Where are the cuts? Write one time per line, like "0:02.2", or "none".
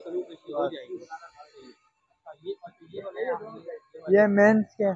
none